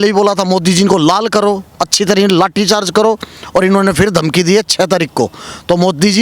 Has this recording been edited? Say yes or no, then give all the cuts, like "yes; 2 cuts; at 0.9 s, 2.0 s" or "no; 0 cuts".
no; 0 cuts